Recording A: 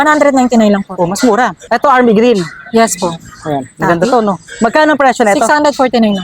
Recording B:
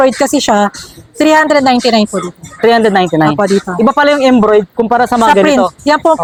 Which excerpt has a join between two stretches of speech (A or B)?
A